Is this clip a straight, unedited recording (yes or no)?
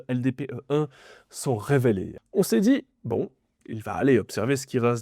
no